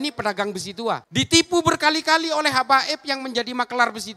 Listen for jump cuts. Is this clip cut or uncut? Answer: uncut